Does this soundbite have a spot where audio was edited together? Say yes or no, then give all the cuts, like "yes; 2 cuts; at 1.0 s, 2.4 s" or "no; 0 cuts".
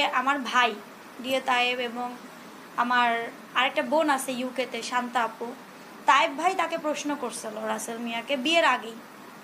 yes; 1 cut; at 5.9 s